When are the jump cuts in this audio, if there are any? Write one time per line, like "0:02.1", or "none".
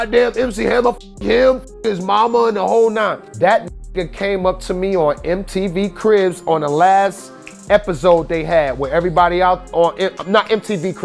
0:03.2